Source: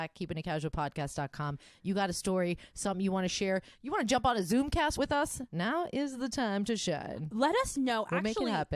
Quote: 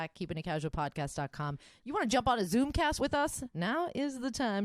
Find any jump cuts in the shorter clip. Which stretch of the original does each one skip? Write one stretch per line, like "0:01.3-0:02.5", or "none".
0:01.7-0:03.7